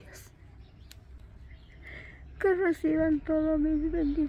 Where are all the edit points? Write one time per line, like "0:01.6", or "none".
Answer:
none